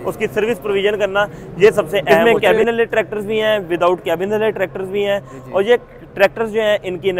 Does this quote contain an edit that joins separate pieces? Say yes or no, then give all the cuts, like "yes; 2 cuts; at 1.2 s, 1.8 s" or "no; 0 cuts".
yes; 1 cut; at 2.2 s